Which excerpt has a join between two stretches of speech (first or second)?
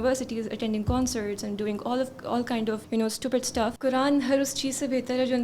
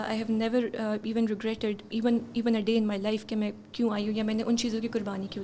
first